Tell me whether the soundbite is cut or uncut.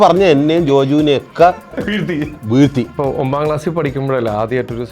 cut